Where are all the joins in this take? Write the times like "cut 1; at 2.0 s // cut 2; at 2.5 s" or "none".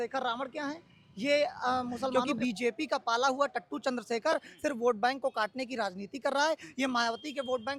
cut 1; at 2.1 s